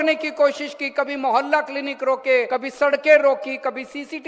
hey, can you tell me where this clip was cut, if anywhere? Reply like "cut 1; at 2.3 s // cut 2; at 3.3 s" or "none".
cut 1; at 2.5 s